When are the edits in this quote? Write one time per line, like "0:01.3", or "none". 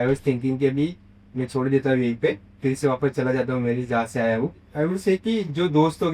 0:04.7